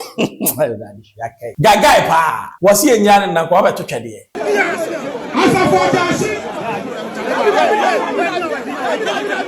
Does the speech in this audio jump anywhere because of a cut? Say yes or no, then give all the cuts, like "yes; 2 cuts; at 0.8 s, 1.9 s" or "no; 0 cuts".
yes; 3 cuts; at 1.4 s, 2.4 s, 4.3 s